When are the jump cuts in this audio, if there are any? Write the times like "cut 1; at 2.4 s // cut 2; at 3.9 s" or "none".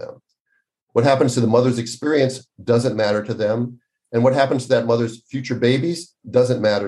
none